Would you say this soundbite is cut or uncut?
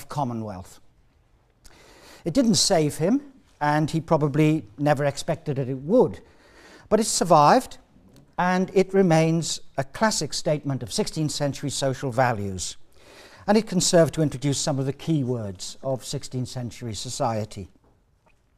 cut